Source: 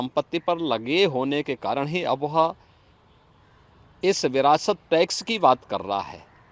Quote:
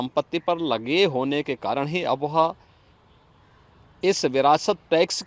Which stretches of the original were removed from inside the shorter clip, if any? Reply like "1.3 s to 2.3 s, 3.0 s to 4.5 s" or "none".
none